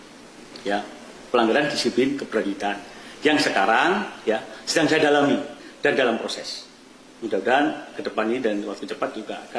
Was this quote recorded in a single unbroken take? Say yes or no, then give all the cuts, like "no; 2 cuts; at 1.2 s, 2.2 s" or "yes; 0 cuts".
yes; 0 cuts